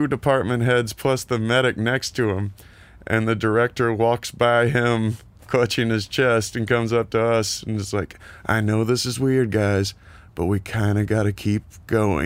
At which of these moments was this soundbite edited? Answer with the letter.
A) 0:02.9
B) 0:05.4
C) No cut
B